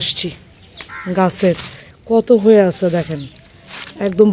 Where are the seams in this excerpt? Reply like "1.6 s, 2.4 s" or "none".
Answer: none